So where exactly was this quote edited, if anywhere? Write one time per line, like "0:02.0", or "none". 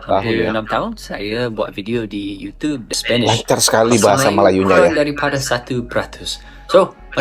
0:03.0